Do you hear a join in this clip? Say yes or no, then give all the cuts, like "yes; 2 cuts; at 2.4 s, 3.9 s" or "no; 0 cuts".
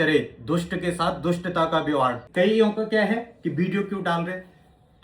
yes; 1 cut; at 2.2 s